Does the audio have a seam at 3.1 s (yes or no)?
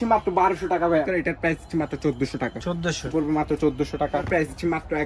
yes